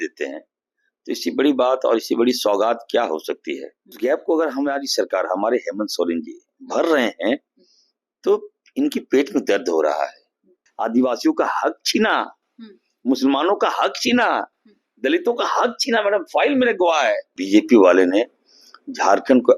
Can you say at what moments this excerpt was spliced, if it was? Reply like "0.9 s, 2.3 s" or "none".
3.9 s, 10.6 s, 17.3 s

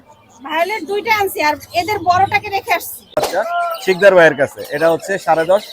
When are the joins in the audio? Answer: 3.2 s

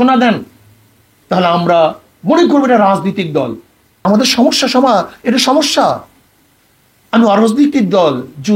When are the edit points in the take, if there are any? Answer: 4.1 s

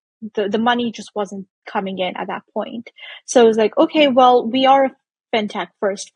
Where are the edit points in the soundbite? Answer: none

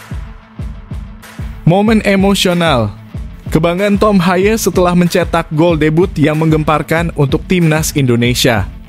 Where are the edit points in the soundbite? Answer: 1.6 s

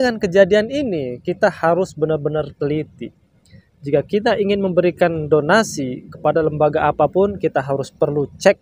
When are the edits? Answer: none

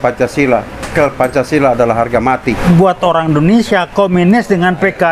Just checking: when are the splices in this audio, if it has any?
0.9 s, 2.6 s

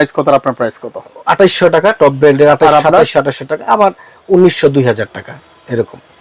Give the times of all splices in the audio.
none

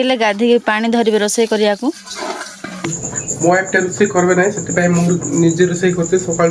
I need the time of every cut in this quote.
2.8 s

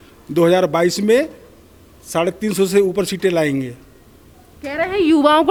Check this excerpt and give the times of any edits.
none

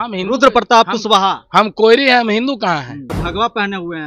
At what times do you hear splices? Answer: 3.2 s

